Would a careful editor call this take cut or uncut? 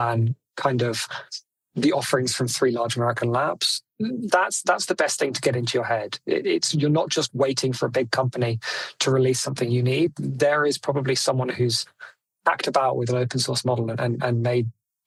uncut